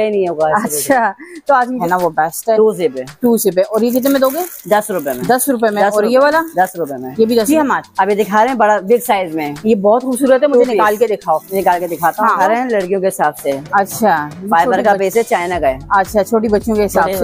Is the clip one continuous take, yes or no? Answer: no